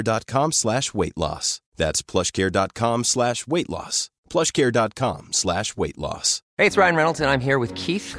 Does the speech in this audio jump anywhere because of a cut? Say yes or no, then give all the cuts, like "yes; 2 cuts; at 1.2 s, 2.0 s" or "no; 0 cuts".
yes; 1 cut; at 6.4 s